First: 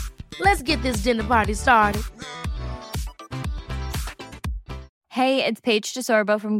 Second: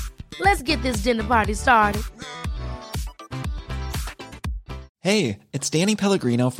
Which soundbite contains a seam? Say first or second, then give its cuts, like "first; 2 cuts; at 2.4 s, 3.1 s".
second; 1 cut; at 4.9 s